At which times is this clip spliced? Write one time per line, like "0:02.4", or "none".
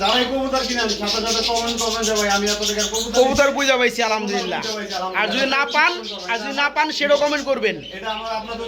none